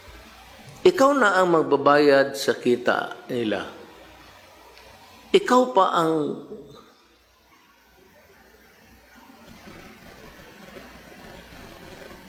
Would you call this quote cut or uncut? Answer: uncut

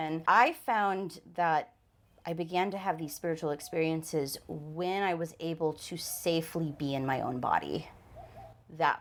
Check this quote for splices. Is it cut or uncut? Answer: uncut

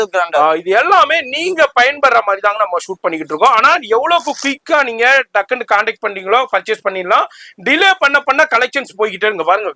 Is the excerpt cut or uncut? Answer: uncut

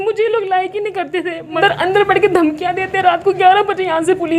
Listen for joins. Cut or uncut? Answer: cut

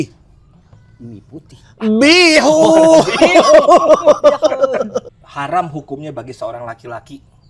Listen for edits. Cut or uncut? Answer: cut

